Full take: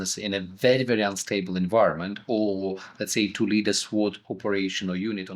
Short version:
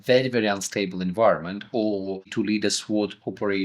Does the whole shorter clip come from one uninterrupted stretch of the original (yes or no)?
no